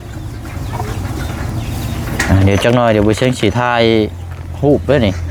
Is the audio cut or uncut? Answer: uncut